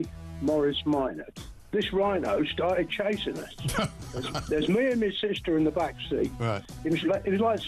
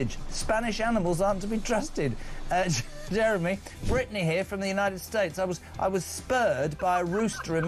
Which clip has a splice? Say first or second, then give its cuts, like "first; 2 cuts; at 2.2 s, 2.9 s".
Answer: first; 1 cut; at 3.9 s